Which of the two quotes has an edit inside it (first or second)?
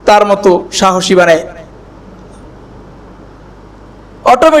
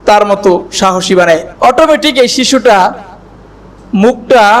second